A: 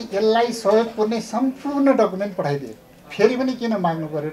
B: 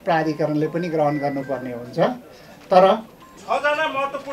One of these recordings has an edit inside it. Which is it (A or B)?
B